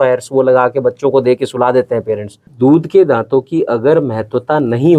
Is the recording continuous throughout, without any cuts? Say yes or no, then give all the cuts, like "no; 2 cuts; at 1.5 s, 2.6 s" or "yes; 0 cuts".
no; 1 cut; at 2.5 s